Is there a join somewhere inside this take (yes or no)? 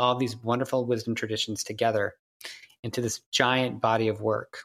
no